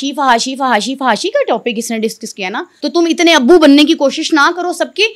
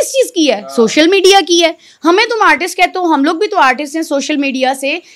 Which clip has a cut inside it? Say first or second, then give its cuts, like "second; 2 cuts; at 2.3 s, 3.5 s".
first; 1 cut; at 2.7 s